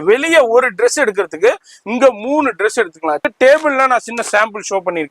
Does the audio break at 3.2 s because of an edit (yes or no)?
yes